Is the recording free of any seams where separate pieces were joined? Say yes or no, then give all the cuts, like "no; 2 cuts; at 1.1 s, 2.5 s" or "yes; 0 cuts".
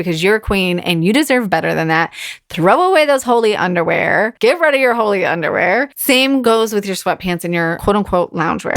no; 3 cuts; at 4.3 s, 6.4 s, 7.8 s